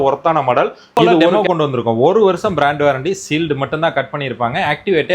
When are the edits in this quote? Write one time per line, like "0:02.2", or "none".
0:01.4